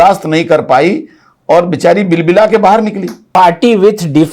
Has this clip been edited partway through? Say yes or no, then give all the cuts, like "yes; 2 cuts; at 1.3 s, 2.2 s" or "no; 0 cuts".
yes; 1 cut; at 3.3 s